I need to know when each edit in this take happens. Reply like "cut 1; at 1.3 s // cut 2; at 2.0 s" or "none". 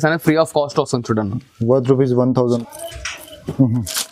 cut 1; at 2.5 s

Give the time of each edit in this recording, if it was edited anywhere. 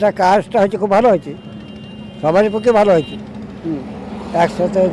none

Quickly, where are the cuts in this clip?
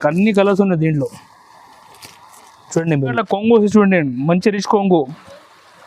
cut 1; at 3.2 s

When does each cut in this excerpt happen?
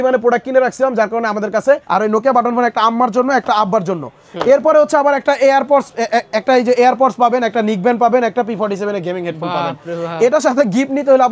cut 1; at 1.8 s

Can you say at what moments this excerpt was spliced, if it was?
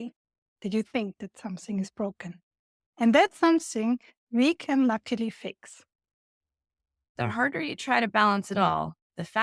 cut 1; at 7.1 s

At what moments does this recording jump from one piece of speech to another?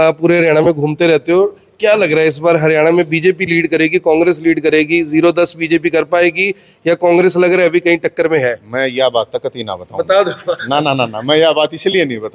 none

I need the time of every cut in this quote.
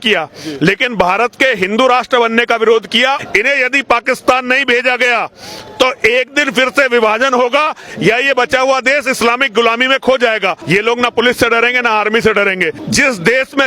cut 1; at 3.2 s // cut 2; at 10.6 s // cut 3; at 12.8 s

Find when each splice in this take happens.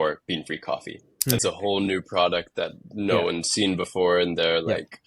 cut 1; at 1.4 s

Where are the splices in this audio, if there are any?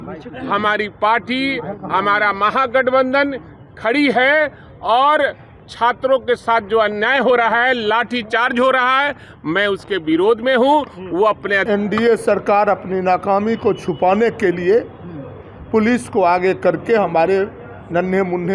cut 1; at 11.6 s

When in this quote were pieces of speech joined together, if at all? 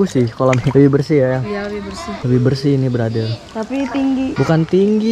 none

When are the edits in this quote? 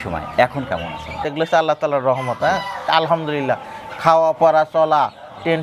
cut 1; at 1.2 s // cut 2; at 2.8 s

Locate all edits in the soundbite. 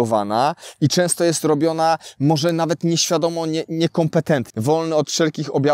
cut 1; at 4.5 s

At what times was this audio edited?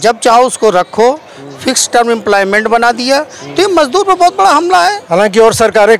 cut 1; at 5.0 s

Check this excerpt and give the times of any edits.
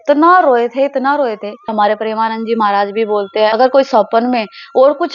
cut 1; at 1.7 s // cut 2; at 3.5 s

